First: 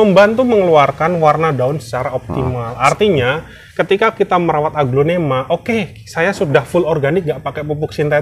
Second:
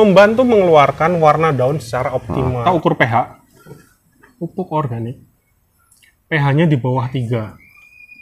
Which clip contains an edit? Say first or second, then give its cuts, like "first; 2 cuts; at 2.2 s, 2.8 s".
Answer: second; 1 cut; at 2.6 s